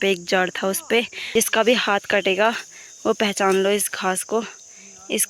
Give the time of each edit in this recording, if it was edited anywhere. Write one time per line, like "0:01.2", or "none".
0:01.2